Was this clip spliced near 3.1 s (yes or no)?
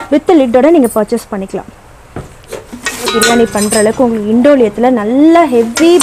yes